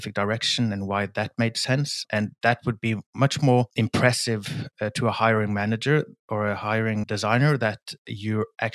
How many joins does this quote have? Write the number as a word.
one